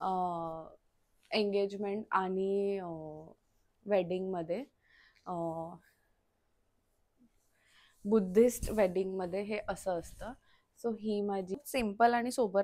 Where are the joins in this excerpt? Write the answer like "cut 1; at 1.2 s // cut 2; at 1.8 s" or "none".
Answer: cut 1; at 11.6 s